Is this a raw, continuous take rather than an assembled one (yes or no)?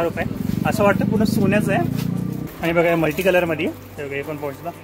no